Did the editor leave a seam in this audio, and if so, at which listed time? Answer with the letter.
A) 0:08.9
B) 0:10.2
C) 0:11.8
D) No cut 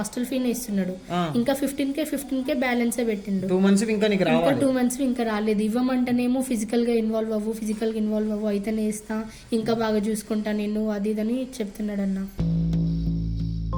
D